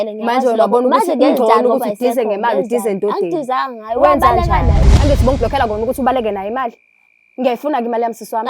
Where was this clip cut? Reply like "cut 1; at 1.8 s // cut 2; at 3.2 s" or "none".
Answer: cut 1; at 4.9 s